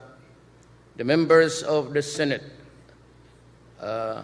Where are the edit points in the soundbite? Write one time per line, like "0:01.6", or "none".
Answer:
none